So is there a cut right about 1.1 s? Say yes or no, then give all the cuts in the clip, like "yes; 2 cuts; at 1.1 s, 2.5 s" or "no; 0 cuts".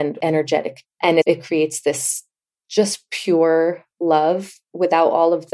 yes; 1 cut; at 1.1 s